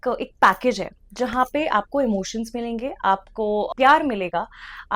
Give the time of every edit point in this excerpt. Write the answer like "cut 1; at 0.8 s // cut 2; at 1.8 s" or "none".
cut 1; at 3.7 s